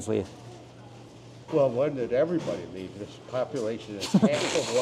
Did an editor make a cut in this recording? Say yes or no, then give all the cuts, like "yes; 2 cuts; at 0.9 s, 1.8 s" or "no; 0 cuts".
no; 0 cuts